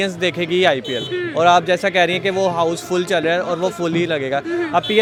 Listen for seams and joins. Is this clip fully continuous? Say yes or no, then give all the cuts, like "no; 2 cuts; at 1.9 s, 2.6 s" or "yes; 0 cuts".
yes; 0 cuts